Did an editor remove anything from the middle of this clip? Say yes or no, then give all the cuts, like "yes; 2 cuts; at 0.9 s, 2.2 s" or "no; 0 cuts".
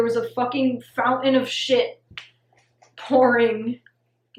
no; 0 cuts